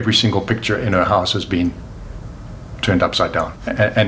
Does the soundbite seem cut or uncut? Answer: uncut